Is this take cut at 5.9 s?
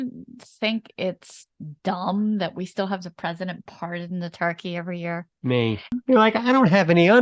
yes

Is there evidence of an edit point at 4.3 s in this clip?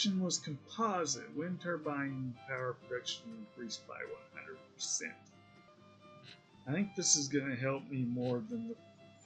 no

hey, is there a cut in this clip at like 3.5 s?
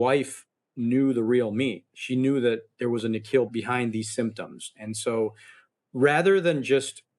yes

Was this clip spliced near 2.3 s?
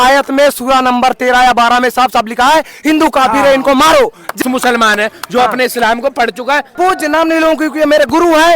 no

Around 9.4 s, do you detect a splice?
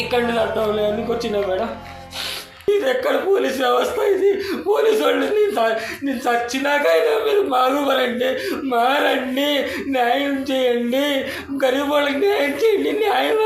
no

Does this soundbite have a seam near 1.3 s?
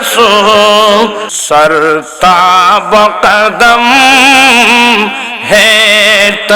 yes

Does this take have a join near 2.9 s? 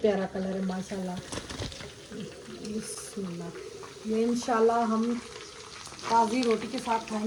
no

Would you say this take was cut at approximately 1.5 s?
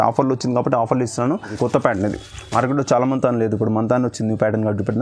yes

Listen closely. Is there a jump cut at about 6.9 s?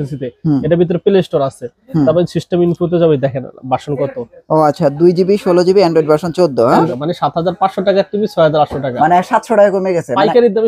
yes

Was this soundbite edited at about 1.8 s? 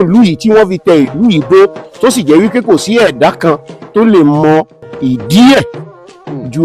no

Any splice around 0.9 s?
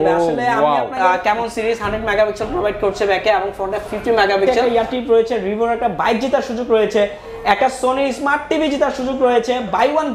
yes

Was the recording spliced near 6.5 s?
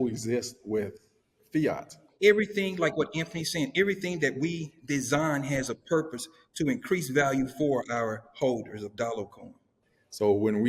no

